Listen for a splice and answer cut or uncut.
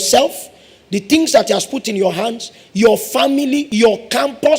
cut